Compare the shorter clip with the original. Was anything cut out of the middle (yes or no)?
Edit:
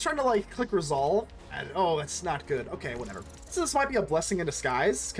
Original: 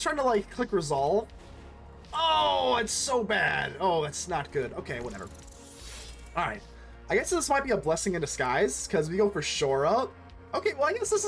yes